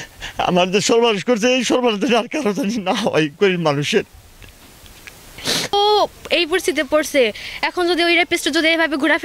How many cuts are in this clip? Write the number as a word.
one